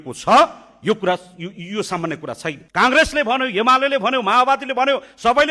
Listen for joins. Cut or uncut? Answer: cut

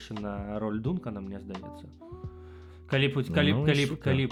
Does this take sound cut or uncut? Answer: uncut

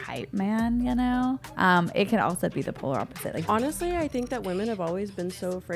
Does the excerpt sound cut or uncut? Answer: cut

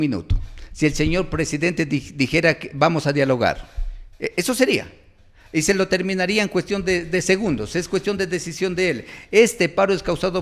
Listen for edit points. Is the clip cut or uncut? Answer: uncut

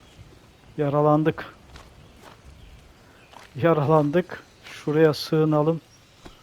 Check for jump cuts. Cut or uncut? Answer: uncut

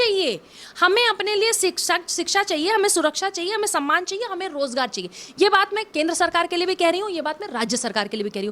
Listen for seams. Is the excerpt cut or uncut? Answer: uncut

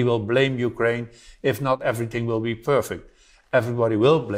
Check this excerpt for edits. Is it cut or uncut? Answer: cut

